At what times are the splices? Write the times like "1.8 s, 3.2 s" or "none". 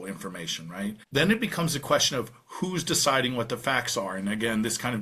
1.0 s

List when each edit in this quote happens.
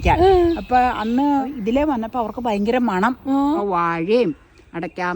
1.5 s, 3.6 s

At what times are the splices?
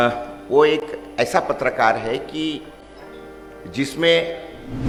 none

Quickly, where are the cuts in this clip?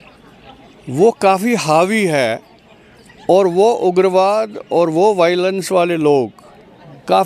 none

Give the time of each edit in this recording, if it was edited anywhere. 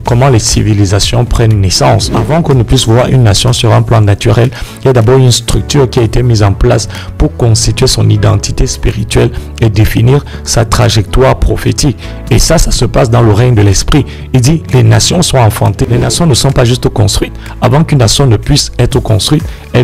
2.2 s, 15.9 s

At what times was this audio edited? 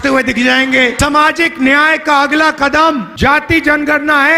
0.9 s, 3.1 s

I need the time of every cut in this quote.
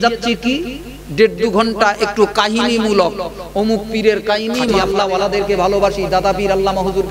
4.7 s

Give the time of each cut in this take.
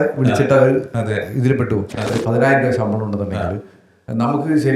2.1 s

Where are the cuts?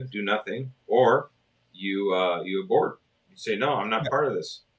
none

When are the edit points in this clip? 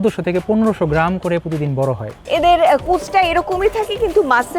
2.2 s

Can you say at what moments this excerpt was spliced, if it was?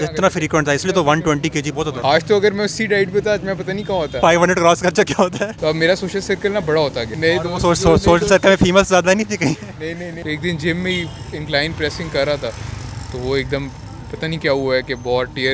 1.9 s, 4.2 s, 5.5 s, 7.1 s, 10.2 s

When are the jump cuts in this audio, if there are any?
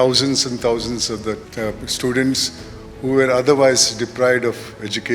1.5 s

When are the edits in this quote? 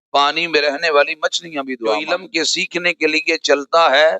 2.0 s

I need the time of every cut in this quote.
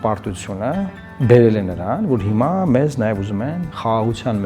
1.0 s

